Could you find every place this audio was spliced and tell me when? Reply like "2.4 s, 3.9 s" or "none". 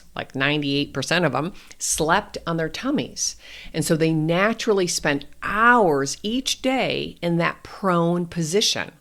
none